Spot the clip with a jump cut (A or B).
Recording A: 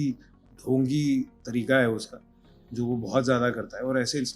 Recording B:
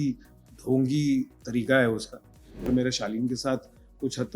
B